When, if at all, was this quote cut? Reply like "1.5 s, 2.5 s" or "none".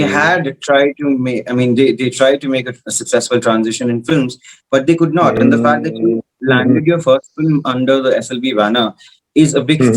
none